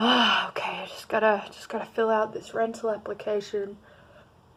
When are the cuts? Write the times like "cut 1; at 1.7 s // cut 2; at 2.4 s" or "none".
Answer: none

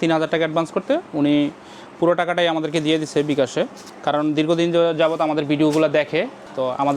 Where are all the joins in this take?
none

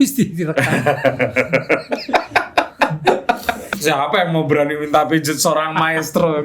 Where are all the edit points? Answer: cut 1; at 3.7 s

